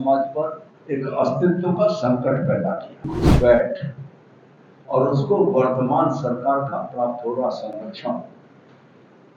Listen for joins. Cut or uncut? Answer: cut